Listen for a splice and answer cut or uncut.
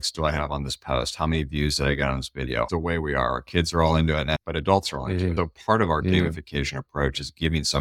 cut